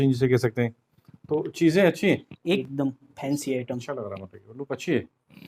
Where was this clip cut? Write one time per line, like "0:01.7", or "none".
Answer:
0:02.6